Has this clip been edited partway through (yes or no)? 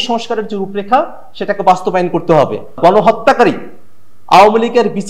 yes